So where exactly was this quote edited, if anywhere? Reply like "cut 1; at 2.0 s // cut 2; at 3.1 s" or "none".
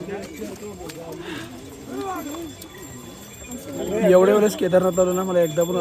none